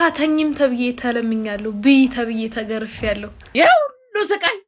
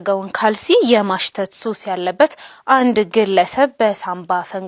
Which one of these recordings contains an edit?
first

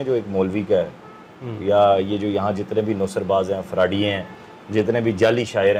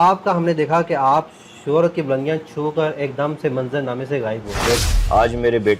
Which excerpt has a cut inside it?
second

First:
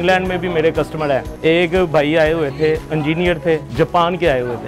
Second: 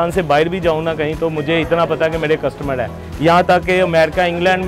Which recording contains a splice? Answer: first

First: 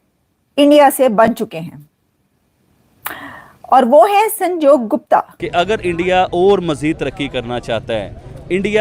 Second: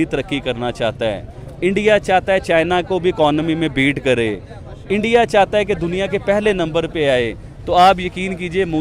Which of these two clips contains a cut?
first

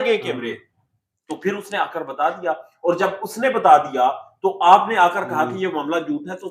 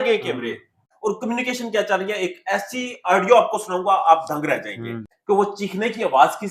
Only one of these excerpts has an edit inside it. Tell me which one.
second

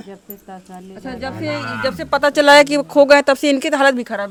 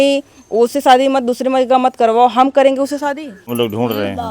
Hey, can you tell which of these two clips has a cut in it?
second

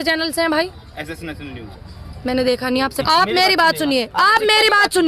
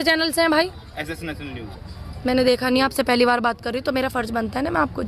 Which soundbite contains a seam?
first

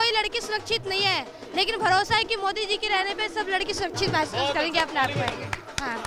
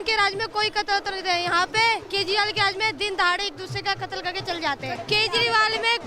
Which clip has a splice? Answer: second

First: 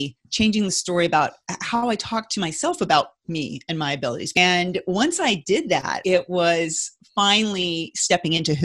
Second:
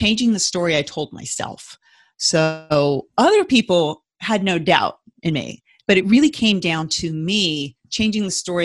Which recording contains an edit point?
first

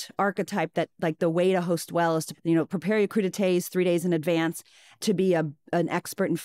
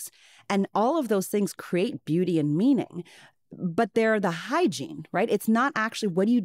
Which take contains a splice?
first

